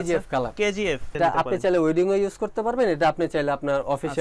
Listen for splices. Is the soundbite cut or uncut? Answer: cut